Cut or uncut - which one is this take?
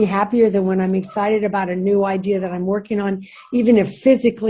uncut